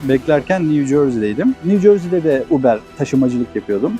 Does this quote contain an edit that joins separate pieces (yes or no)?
yes